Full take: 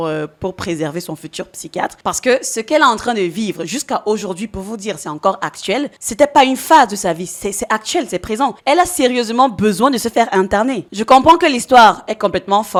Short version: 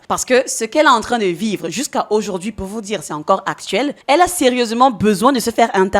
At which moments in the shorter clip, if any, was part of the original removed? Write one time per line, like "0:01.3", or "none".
0:04.0